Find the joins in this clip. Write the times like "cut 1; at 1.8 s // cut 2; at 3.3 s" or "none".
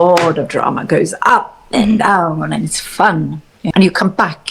cut 1; at 3.6 s